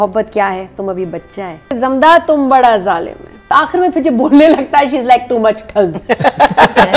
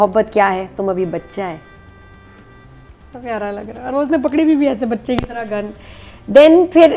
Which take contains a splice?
first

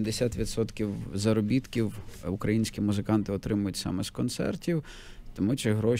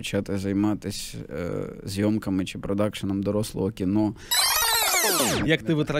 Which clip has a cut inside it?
second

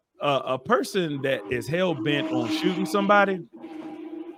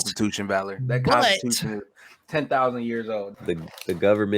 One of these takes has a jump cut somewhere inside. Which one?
second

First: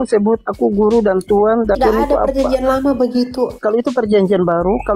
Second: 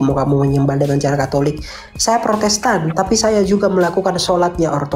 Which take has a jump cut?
first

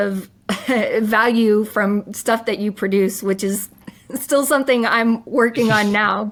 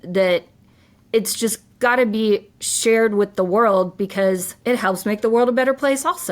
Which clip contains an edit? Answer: second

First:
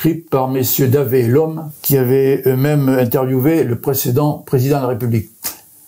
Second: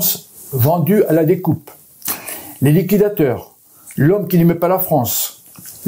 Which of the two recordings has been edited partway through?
first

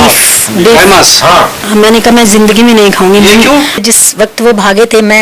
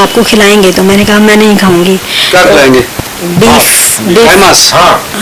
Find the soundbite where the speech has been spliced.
first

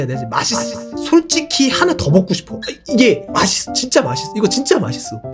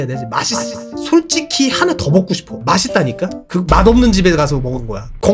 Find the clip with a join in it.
second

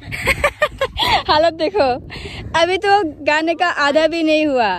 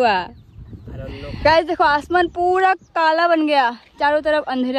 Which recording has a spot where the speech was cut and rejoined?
second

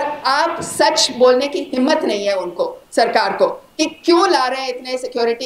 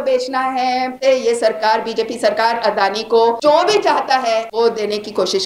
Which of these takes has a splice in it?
second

